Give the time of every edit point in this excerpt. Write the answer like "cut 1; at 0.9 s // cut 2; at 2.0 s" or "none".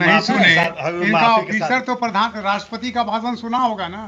none